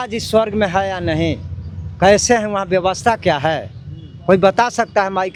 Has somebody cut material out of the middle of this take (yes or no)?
no